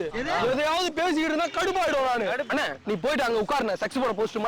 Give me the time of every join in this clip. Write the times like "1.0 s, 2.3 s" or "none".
2.4 s